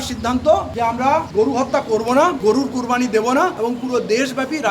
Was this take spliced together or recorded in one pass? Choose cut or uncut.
cut